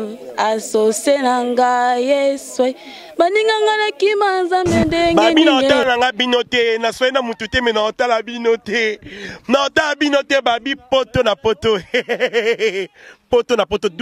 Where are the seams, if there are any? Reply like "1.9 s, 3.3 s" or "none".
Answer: 5.8 s